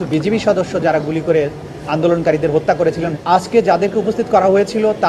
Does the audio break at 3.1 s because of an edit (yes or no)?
yes